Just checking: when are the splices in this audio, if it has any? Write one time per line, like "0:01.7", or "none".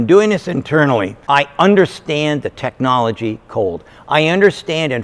0:01.1

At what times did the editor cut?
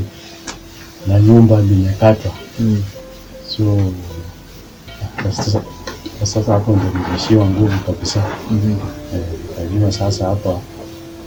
none

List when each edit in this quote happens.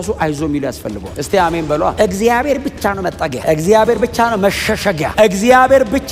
none

